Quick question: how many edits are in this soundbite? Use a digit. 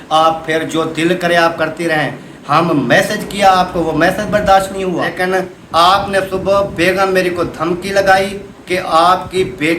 1